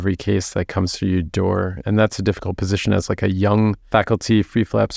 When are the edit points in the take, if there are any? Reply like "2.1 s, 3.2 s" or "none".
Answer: 1.8 s, 3.8 s